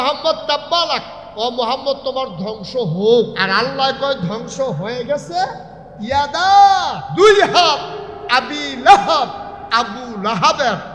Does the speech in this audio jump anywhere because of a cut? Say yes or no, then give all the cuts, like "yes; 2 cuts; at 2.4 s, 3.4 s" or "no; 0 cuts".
yes; 3 cuts; at 1.2 s, 3.4 s, 7.0 s